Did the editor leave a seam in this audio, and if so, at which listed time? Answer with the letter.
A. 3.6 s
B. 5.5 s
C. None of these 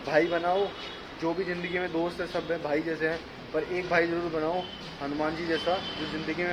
C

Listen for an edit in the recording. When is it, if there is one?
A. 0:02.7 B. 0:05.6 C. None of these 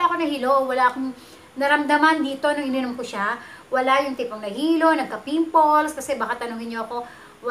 C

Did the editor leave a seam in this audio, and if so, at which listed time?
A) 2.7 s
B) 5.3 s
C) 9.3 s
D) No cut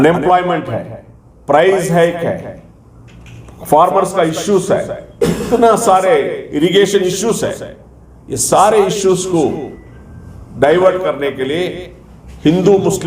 D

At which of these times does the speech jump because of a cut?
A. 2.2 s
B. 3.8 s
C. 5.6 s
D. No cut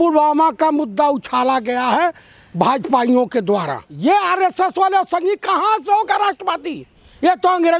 B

